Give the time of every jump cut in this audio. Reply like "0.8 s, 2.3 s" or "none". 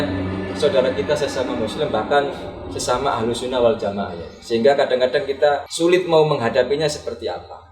5.7 s